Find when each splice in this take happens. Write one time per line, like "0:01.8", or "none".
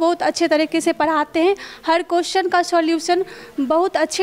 none